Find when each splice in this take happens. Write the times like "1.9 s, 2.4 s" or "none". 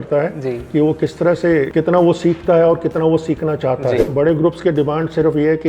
1.7 s, 4.1 s